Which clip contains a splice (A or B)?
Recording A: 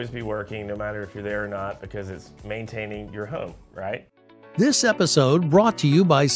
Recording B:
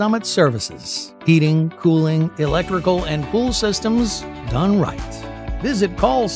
A